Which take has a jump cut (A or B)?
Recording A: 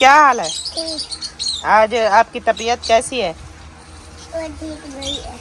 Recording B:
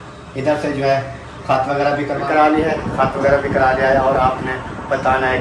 B